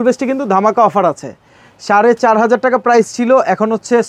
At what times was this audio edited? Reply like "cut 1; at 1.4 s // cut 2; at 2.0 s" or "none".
none

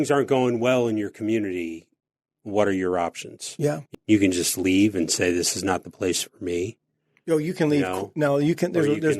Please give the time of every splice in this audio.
cut 1; at 3.9 s

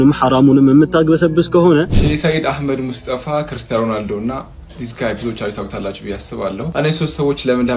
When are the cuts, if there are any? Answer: cut 1; at 2.0 s // cut 2; at 6.7 s

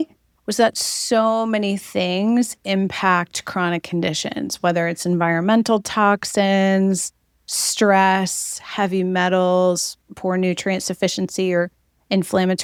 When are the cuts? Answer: none

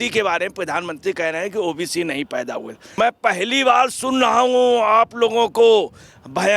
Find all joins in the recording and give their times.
cut 1; at 2.8 s

